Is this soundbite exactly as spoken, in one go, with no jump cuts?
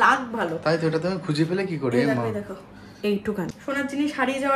no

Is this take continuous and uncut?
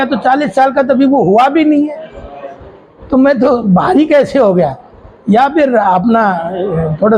yes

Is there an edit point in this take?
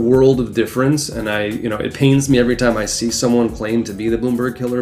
no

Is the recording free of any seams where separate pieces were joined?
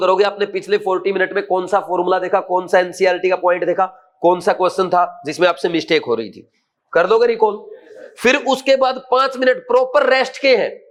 yes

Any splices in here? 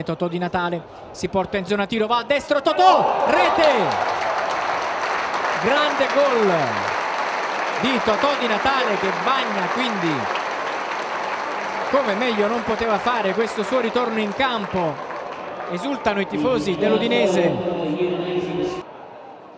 no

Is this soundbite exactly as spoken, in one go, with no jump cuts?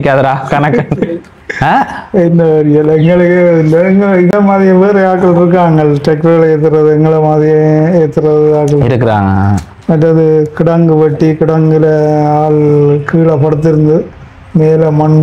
yes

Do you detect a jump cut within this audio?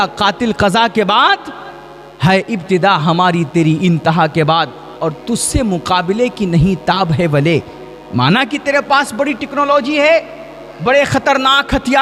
no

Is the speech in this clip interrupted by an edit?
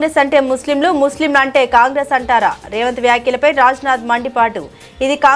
no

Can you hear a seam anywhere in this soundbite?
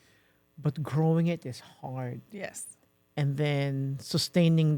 no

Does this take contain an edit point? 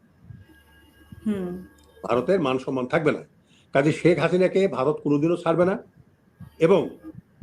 no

